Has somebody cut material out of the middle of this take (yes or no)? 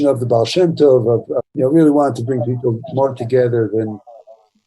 yes